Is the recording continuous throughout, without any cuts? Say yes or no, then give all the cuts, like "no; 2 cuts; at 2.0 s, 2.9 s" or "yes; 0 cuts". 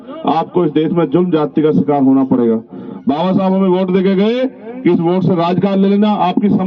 yes; 0 cuts